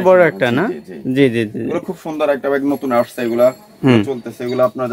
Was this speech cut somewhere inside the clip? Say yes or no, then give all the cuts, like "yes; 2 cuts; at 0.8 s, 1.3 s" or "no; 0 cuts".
no; 0 cuts